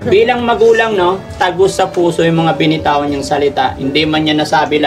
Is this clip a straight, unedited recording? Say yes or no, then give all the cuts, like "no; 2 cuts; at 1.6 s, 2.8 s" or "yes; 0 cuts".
yes; 0 cuts